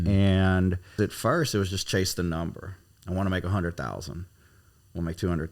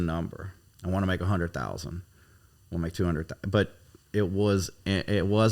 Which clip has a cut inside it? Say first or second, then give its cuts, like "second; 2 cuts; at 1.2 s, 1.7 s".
first; 1 cut; at 0.9 s